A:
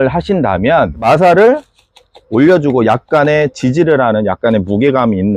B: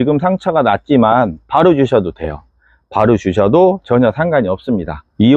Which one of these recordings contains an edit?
A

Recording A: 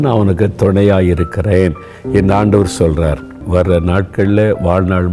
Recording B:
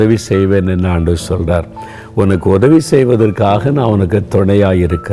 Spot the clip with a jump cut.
A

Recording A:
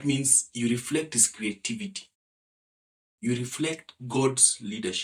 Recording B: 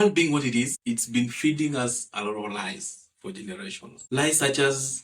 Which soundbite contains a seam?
B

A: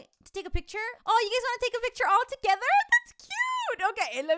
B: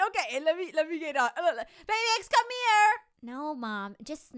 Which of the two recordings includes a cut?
A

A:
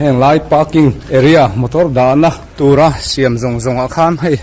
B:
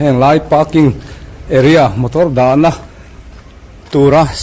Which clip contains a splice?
A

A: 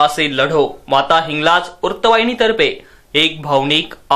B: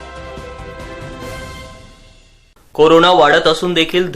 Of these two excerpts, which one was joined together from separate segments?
B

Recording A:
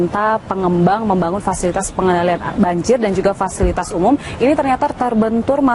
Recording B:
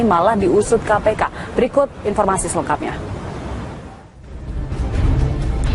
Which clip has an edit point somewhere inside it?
B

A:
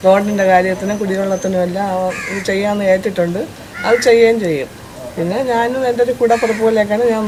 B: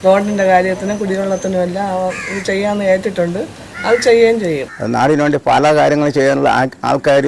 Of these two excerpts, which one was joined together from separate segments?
B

